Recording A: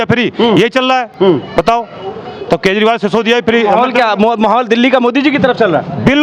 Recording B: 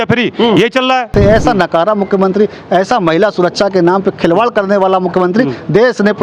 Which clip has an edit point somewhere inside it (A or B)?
B